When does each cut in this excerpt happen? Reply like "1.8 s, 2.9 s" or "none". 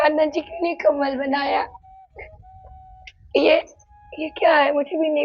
none